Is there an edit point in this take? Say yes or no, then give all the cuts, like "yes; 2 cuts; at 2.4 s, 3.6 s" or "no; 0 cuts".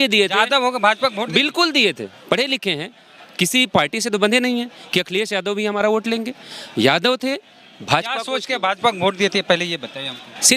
no; 0 cuts